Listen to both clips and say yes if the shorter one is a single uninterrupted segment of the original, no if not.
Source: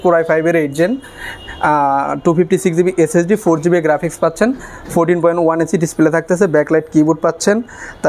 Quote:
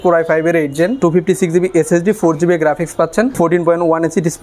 no